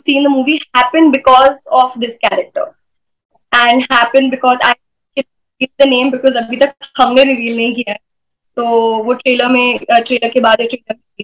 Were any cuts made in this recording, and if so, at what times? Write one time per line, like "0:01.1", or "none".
none